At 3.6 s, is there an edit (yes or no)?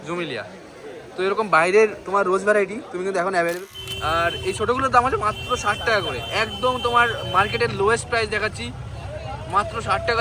yes